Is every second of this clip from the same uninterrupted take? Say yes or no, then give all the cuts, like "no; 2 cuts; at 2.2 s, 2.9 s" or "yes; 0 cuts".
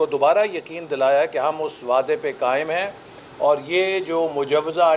yes; 0 cuts